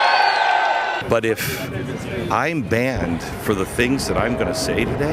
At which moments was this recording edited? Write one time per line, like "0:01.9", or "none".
0:01.0